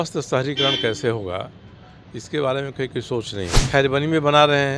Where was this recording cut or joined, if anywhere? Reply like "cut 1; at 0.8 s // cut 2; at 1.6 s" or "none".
cut 1; at 3.6 s